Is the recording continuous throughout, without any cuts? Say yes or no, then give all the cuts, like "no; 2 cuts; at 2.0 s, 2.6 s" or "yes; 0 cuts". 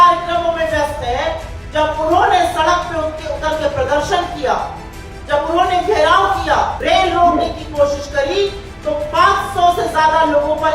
no; 1 cut; at 6.8 s